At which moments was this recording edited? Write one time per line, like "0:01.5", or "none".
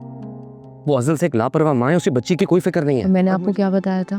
0:03.0

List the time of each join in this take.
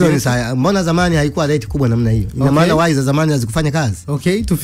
none

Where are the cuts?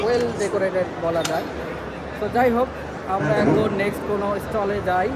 none

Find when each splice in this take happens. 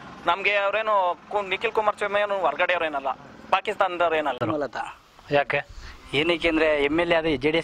0:04.4

